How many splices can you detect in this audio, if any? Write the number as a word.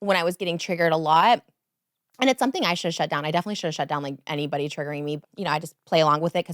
one